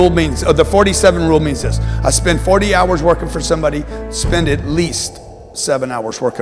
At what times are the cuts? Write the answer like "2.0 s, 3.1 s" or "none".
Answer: none